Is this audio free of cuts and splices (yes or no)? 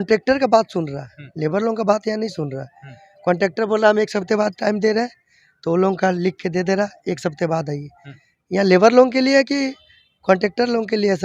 yes